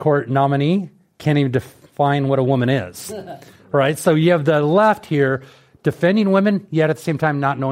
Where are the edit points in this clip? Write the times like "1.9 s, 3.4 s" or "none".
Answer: none